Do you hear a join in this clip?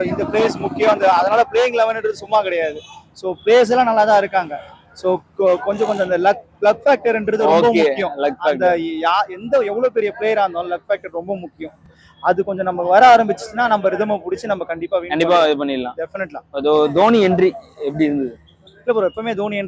no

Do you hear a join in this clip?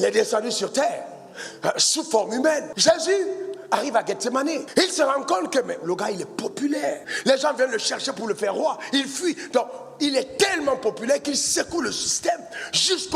yes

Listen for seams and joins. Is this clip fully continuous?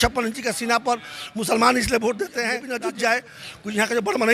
no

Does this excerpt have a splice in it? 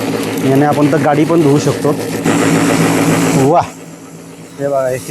yes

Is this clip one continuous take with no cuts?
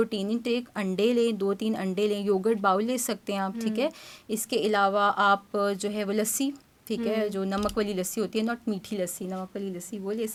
yes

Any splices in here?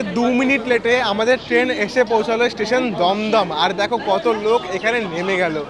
no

